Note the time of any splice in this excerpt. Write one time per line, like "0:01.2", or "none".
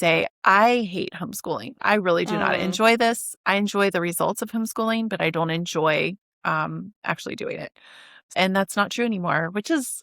0:08.3